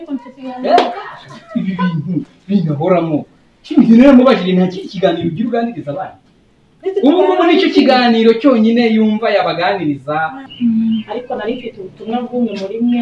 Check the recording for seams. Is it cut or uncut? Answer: cut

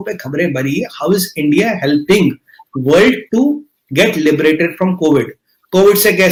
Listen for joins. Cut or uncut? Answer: uncut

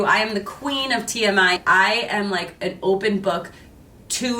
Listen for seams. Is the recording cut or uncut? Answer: cut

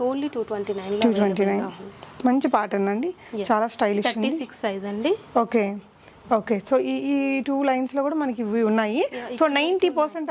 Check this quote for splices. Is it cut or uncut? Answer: uncut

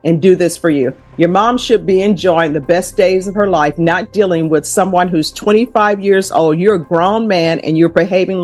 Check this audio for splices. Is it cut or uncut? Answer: uncut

